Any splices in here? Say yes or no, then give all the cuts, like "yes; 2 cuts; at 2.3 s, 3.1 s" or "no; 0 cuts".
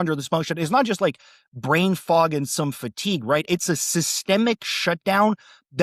no; 0 cuts